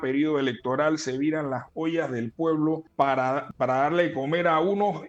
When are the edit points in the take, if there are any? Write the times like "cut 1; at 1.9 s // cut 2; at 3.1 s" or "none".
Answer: cut 1; at 3.3 s